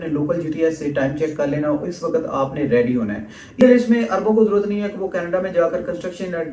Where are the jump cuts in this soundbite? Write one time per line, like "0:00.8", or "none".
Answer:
0:03.6